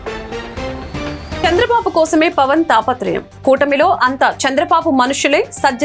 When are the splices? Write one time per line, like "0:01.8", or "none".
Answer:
0:01.4